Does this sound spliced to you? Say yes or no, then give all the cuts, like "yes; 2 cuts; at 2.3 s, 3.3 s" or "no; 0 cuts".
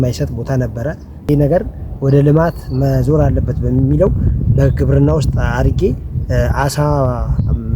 yes; 1 cut; at 1.1 s